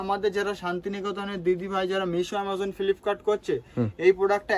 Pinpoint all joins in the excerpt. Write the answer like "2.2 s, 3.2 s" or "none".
none